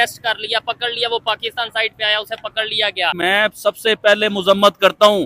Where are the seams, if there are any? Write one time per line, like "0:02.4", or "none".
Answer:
0:03.2